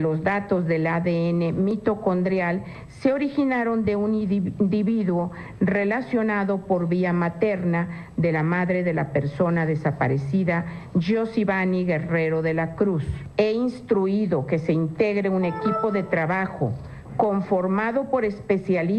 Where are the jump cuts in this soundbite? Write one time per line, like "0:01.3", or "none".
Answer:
0:11.6